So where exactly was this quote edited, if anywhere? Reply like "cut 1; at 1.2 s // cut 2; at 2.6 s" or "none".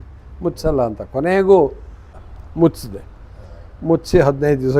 cut 1; at 2.1 s